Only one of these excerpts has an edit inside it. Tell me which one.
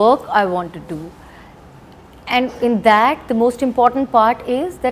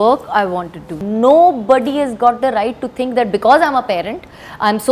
second; 1 cut; at 0.9 s

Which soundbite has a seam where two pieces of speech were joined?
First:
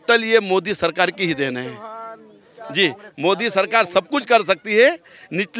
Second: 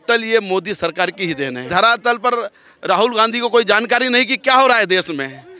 second; 1 cut; at 1.7 s

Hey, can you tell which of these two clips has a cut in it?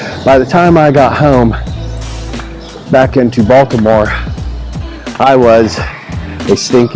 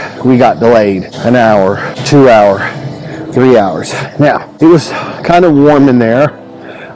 second; 3 cuts; at 1.1 s, 1.9 s, 4.5 s

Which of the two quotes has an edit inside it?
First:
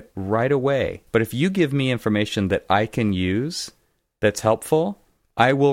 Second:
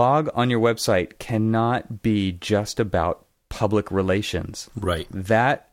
first; 1 cut; at 1.0 s

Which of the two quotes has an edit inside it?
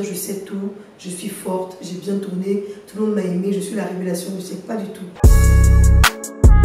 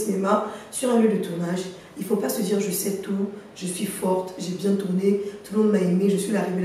first; 1 cut; at 5.1 s

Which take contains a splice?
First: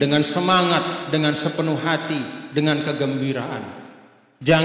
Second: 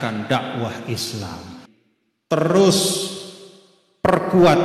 second; 1 cut; at 1.6 s

